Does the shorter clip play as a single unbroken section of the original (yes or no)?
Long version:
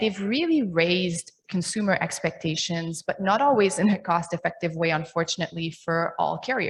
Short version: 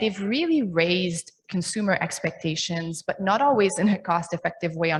yes